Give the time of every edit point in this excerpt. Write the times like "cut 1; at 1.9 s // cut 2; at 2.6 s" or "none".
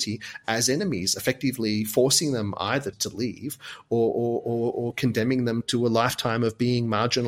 cut 1; at 3.0 s // cut 2; at 5.6 s